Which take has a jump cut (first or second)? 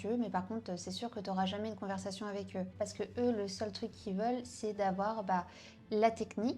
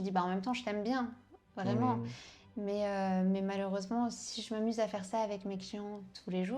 first